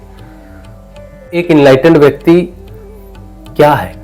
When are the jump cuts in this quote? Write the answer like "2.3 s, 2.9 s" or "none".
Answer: 1.4 s